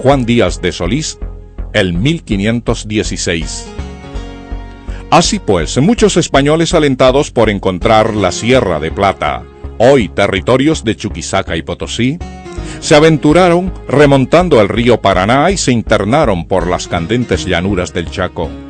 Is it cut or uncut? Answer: uncut